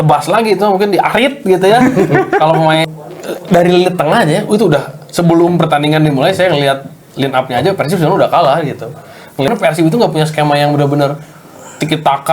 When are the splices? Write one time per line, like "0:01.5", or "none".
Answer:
0:02.8
0:09.5